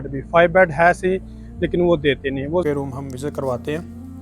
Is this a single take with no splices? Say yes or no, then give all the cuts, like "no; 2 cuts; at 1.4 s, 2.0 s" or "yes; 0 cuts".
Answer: no; 1 cut; at 2.6 s